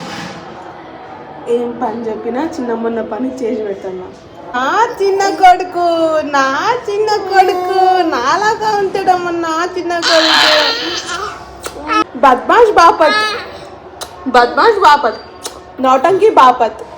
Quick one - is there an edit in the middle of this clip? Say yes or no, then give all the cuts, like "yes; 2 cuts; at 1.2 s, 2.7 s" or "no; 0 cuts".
yes; 2 cuts; at 4.6 s, 12.0 s